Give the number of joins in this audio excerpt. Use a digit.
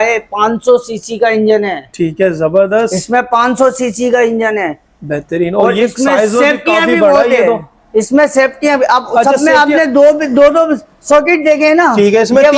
0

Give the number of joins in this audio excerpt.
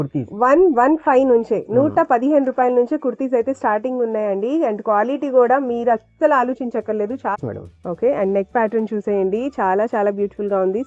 1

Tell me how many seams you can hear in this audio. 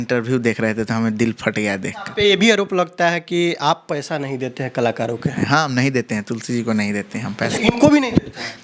3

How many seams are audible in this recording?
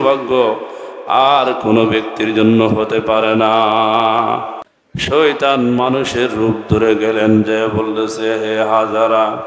1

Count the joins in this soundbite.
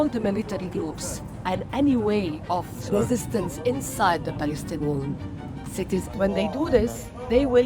2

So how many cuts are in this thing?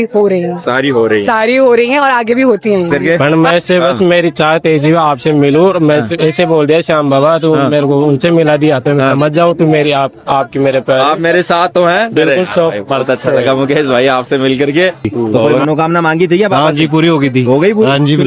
2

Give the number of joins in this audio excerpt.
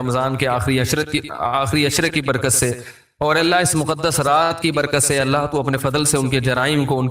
0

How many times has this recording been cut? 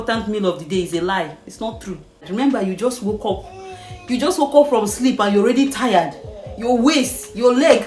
1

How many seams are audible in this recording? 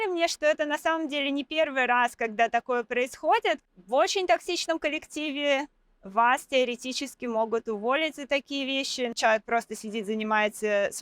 2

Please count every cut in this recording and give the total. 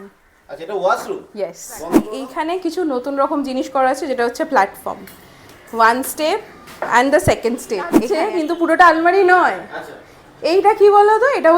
2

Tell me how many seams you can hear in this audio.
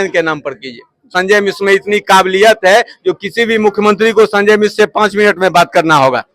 1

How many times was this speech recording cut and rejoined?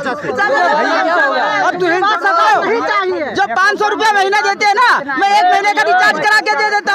0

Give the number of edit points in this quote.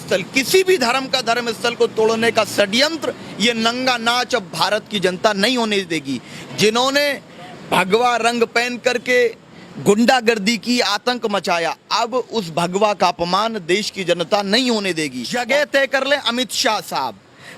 1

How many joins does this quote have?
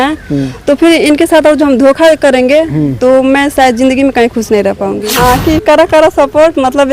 1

